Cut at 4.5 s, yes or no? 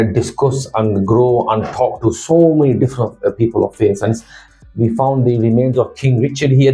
yes